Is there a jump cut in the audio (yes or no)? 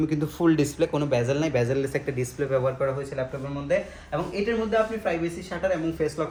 no